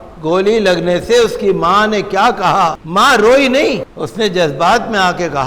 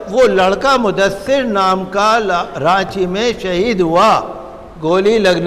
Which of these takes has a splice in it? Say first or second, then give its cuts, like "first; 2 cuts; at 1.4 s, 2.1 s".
first; 2 cuts; at 2.8 s, 3.9 s